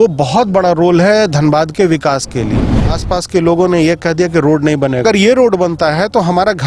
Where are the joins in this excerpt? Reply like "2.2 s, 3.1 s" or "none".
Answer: 2.9 s, 5.0 s